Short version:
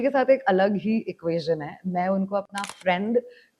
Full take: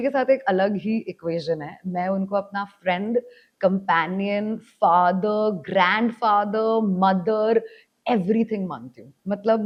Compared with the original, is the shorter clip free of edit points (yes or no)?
yes